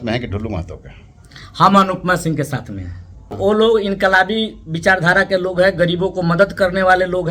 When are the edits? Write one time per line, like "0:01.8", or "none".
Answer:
0:03.4